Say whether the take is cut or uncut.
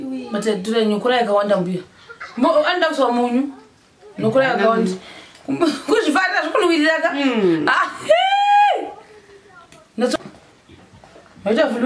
cut